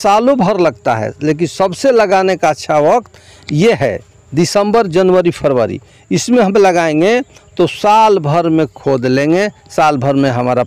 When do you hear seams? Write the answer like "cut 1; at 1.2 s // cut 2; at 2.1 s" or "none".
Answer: none